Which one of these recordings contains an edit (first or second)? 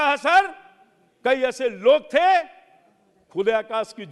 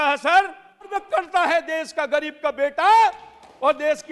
second